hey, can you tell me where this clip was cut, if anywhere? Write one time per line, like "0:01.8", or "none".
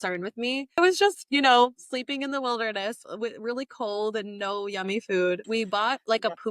0:00.8
0:05.4